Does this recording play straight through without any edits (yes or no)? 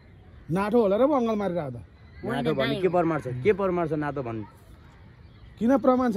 yes